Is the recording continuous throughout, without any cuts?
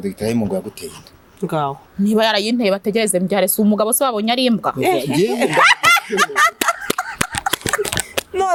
yes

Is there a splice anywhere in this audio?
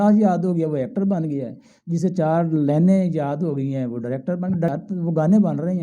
yes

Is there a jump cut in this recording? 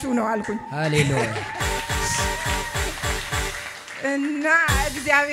no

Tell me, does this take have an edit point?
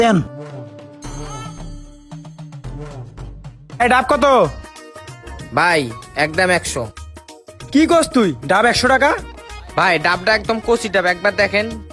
yes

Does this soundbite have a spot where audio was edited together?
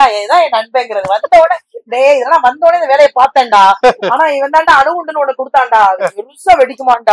no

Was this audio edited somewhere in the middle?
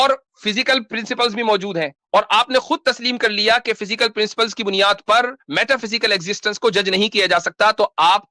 no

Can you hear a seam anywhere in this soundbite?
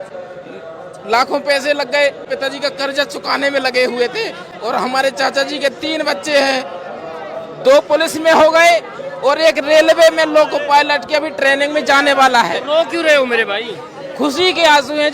yes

